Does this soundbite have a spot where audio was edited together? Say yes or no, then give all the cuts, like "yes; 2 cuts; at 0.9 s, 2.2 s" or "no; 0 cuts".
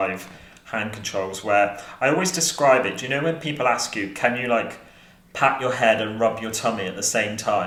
no; 0 cuts